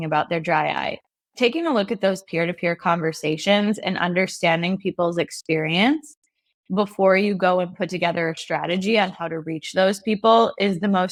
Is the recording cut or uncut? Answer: uncut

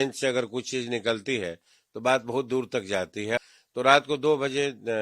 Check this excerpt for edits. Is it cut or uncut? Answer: cut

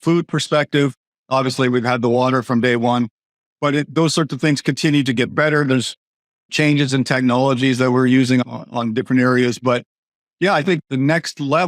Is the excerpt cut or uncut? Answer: cut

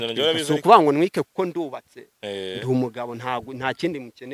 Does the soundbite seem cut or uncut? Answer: uncut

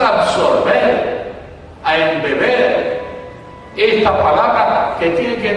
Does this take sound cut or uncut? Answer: uncut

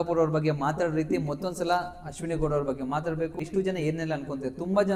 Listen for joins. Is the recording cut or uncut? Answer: uncut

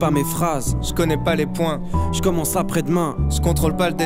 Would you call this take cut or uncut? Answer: uncut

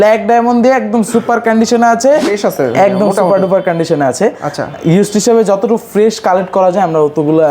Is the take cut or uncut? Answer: cut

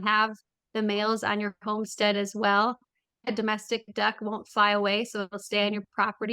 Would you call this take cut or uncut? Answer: cut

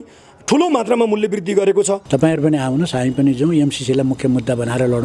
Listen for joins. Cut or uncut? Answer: cut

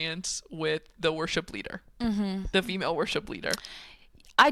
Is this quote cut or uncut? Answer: uncut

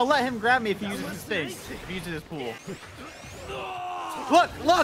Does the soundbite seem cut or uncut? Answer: cut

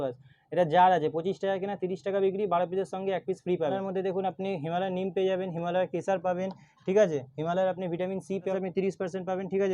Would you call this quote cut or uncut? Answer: cut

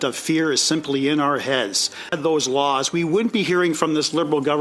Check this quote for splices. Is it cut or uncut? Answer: cut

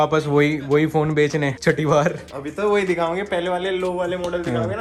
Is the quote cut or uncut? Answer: uncut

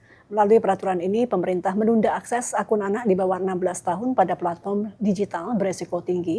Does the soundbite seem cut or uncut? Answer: uncut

